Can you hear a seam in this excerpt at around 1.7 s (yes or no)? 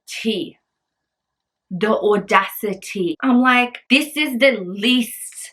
no